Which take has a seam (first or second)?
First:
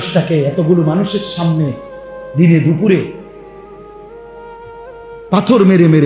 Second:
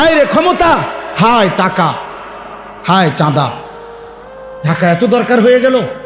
first